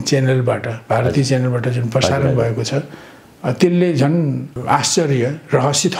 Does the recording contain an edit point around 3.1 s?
no; 1 cut; at 4.5 s

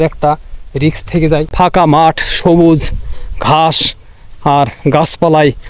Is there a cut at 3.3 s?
no; 1 cut; at 1.5 s

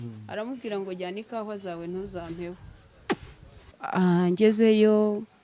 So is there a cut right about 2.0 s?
no; 1 cut; at 3.8 s

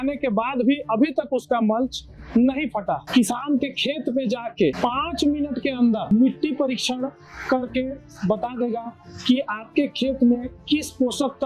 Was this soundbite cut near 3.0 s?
yes; 1 cut; at 3.0 s

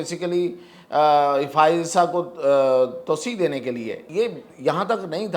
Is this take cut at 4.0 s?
yes; 1 cut; at 4.0 s

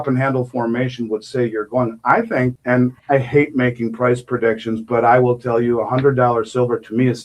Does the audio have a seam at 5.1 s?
no; 1 cut; at 2.6 s

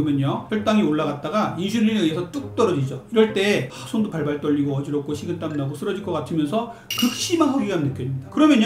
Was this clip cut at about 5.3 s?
no; 1 cut; at 3.8 s

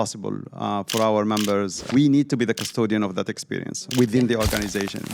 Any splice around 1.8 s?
yes; 2 cuts; at 1.8 s, 3.8 s

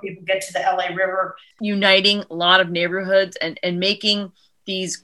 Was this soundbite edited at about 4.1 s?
no; 1 cut; at 1.4 s

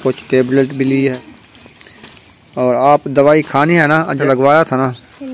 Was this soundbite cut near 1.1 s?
yes; 2 cuts; at 1.1 s, 4.2 s

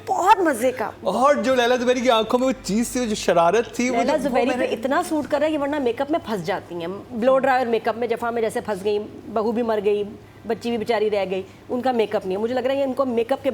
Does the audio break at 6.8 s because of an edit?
no; 0 cuts

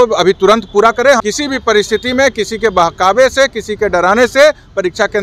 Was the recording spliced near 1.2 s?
yes; 1 cut; at 1.2 s

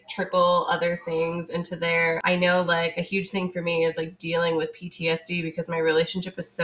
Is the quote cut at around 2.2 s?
yes; 1 cut; at 2.2 s

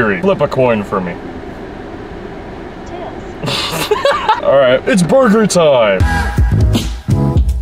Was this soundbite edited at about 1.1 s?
no; 1 cut; at 6.0 s

